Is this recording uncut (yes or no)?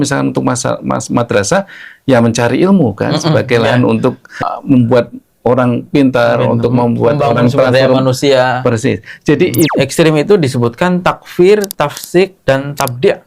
no